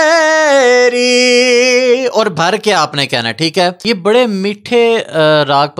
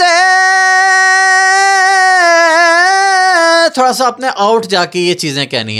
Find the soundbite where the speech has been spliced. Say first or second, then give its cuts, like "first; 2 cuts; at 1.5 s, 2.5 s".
first; 1 cut; at 3.8 s